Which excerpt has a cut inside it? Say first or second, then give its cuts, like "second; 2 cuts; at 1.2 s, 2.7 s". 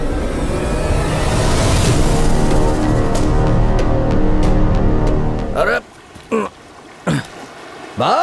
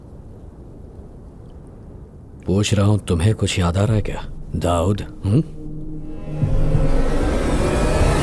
first; 1 cut; at 5.4 s